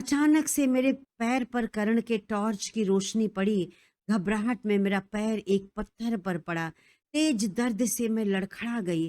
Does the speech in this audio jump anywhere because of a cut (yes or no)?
yes